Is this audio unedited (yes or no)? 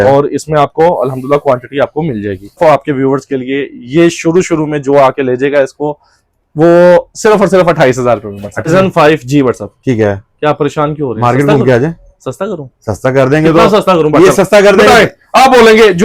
no